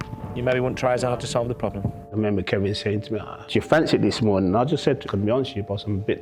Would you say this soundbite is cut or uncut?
cut